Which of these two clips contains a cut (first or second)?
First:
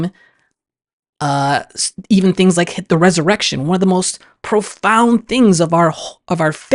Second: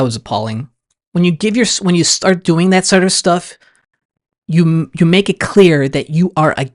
second